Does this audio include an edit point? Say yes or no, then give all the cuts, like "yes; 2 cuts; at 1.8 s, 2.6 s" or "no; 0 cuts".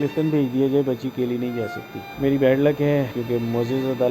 yes; 2 cuts; at 2.1 s, 3.1 s